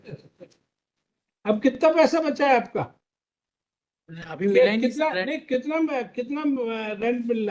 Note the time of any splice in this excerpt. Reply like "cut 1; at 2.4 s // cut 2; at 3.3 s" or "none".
cut 1; at 1.2 s